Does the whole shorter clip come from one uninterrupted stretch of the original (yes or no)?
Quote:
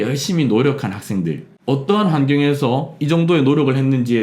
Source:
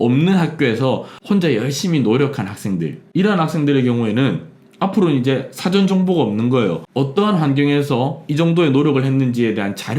no